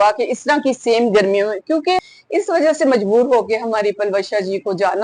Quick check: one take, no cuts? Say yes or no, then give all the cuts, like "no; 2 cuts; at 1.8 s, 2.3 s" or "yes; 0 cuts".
no; 1 cut; at 2.1 s